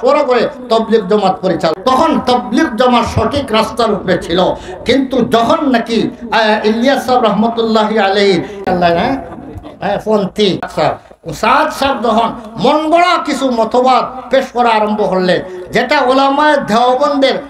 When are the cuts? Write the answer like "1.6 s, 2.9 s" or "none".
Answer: 1.7 s, 8.6 s, 10.7 s